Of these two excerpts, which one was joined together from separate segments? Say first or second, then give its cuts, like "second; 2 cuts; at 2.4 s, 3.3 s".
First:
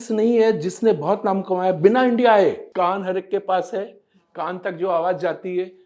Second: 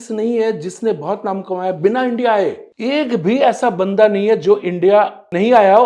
first; 1 cut; at 2.6 s